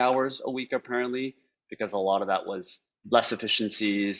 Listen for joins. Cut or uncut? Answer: cut